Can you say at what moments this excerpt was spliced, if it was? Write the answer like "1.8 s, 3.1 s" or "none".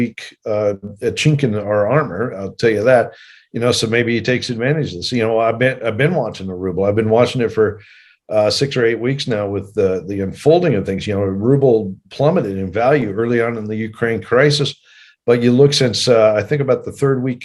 none